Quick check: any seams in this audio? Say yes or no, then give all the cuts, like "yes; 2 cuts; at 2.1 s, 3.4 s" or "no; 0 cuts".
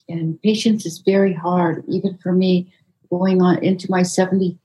yes; 1 cut; at 3.0 s